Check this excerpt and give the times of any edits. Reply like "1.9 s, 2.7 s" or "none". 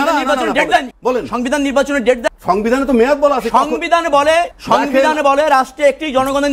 0.9 s, 2.3 s, 4.6 s